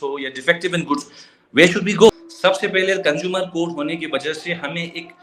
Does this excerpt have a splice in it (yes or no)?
yes